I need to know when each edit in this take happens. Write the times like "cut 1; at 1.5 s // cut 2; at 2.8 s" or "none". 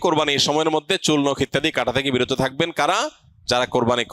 none